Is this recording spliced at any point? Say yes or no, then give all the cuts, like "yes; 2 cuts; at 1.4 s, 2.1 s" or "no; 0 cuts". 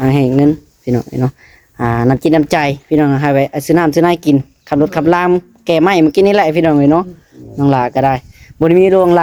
no; 0 cuts